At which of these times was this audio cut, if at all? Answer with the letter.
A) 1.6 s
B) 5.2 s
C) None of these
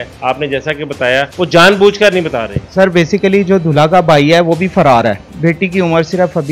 B